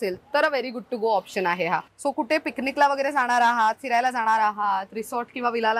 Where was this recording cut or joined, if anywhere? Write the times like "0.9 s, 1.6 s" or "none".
1.9 s